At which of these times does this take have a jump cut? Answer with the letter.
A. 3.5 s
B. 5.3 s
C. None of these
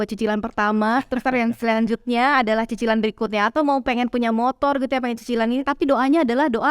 C